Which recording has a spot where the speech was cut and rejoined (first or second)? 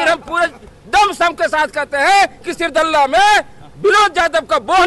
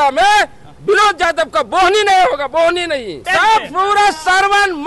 second